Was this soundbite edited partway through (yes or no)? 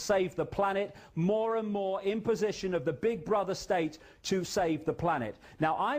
no